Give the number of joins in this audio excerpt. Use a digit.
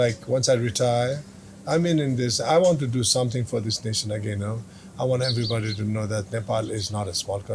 0